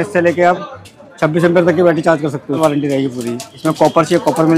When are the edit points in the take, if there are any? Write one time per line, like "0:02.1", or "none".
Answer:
0:02.6

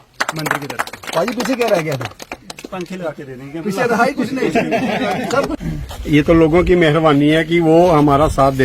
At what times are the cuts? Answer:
0:05.6

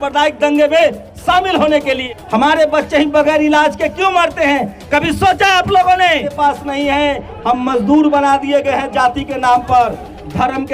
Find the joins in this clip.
0:02.0
0:06.3

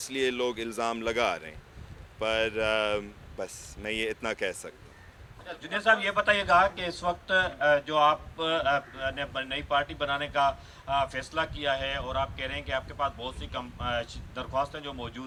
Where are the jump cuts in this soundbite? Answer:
none

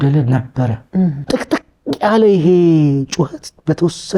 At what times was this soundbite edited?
0:01.2

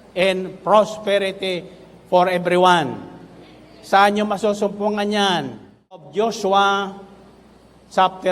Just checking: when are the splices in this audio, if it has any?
0:06.1

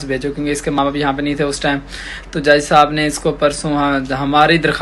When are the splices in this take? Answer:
none

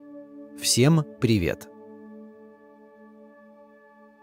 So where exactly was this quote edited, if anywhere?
0:00.7
0:01.6

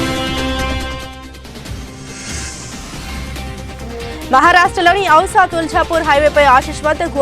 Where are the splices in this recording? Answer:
0:03.6

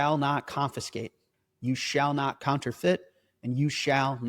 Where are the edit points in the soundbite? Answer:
0:02.4

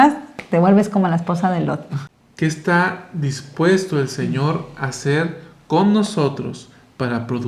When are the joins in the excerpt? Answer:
0:01.9

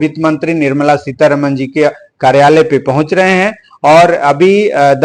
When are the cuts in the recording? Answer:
none

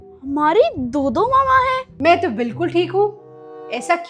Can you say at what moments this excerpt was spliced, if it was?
0:01.9

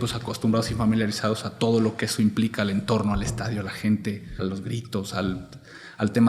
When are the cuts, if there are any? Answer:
0:04.4

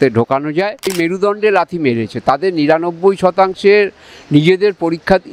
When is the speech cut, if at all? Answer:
0:00.9

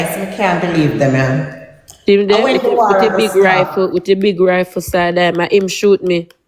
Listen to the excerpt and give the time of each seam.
none

